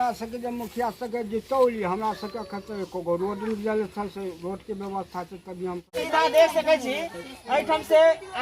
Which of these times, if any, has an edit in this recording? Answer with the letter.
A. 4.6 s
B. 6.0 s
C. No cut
B